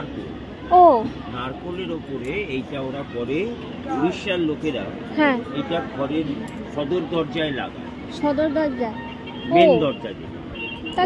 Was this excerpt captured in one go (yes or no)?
yes